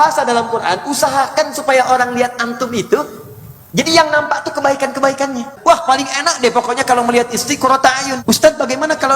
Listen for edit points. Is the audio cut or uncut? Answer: cut